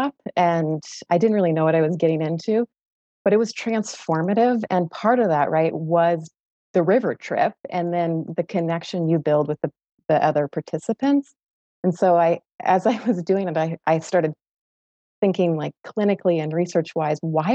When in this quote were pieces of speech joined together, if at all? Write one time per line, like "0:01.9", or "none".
none